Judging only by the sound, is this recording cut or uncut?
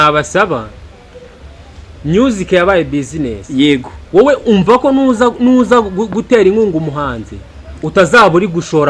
uncut